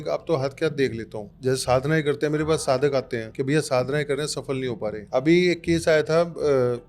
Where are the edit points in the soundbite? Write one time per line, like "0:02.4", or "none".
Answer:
0:01.3
0:03.2
0:05.0